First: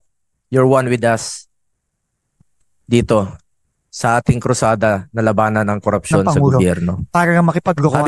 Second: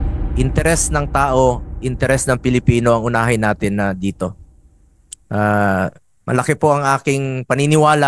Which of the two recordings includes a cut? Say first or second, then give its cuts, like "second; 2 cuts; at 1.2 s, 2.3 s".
first; 1 cut; at 7.0 s